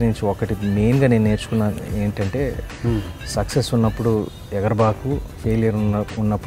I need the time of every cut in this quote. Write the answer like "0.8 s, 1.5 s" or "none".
none